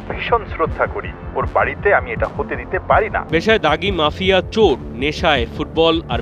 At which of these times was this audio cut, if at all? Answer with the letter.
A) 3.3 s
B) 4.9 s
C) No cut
A